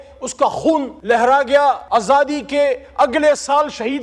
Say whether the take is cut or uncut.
cut